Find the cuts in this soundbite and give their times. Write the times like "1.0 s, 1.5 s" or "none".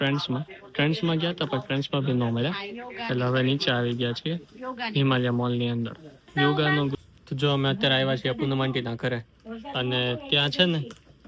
6.9 s